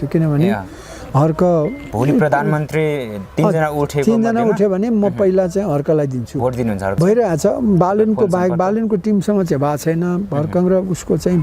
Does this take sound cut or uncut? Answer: cut